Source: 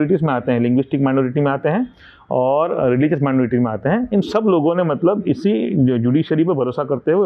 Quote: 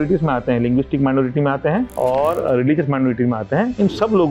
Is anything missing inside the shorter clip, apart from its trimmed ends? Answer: yes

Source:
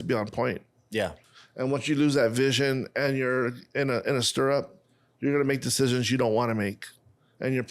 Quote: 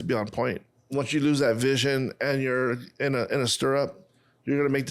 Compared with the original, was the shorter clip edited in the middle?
yes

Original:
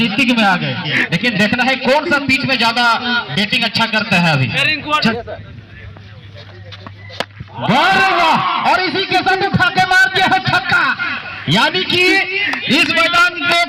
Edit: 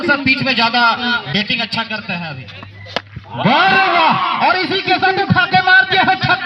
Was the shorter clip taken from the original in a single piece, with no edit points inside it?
no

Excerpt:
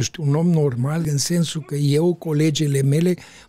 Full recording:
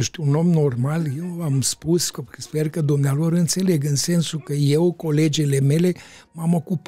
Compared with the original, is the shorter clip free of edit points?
no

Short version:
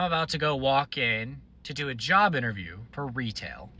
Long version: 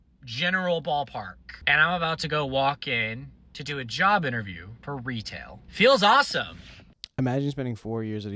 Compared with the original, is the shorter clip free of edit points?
yes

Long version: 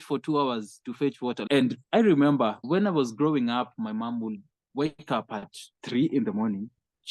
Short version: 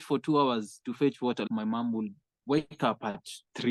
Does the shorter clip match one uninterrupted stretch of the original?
no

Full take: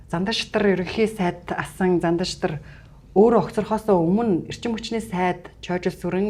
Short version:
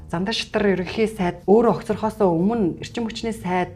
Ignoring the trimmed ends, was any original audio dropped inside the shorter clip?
yes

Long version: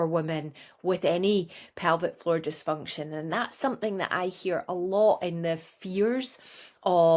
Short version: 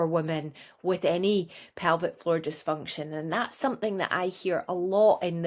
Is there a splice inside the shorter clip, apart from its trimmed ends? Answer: no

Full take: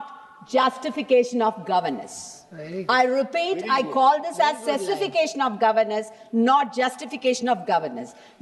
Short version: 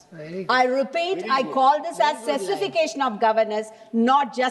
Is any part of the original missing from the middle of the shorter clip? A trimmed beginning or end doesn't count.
no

